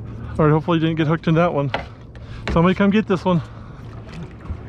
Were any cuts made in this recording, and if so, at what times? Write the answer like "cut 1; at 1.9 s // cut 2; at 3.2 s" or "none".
cut 1; at 3.8 s